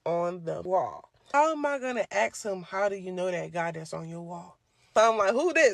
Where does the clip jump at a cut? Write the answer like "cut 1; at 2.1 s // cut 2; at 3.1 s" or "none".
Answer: cut 1; at 1.1 s // cut 2; at 4.7 s